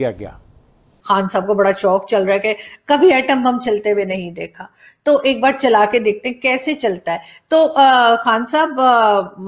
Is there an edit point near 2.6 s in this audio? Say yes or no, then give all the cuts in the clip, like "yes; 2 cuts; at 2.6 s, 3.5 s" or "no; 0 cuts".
no; 1 cut; at 0.9 s